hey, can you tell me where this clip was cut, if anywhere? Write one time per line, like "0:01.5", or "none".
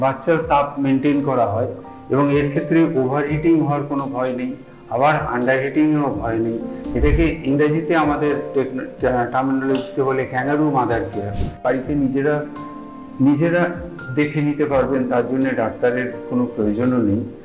0:11.6